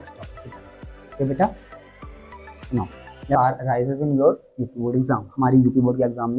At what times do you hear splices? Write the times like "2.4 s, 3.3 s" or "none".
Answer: 3.3 s

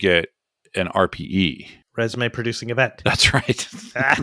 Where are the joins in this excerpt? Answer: none

